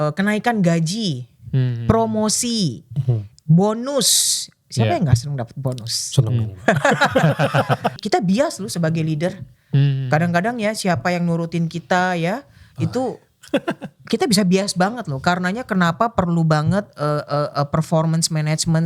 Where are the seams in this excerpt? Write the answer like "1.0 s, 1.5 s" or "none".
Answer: 7.9 s